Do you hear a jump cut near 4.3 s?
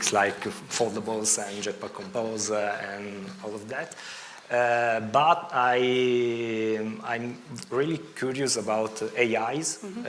no; 0 cuts

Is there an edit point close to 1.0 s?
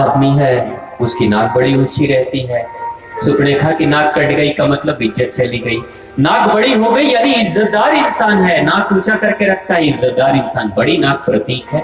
no; 0 cuts

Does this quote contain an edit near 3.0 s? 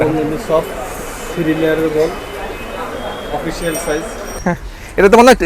no; 1 cut; at 4.4 s

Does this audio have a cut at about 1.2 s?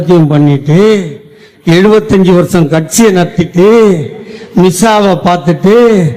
no; 0 cuts

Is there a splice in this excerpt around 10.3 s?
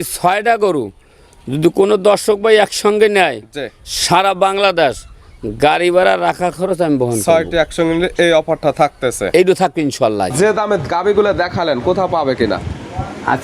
yes; 1 cut; at 10.3 s

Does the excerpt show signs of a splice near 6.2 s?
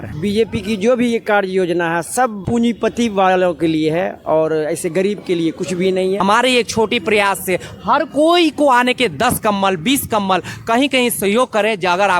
yes; 1 cut; at 6.2 s

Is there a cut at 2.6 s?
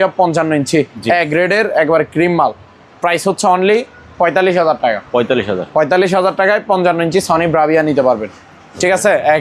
no; 0 cuts

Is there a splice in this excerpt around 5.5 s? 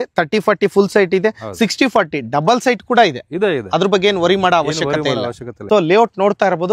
yes; 1 cut; at 5.5 s

